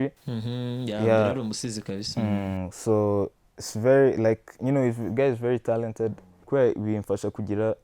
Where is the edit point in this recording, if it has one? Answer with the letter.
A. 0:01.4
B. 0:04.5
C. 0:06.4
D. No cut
C